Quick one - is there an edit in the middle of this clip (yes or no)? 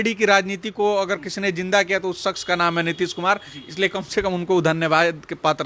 no